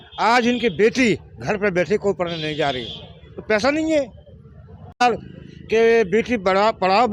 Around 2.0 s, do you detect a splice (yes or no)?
no